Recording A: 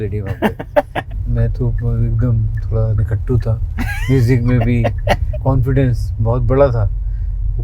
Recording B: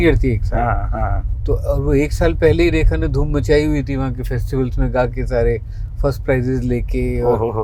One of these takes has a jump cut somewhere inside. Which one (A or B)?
A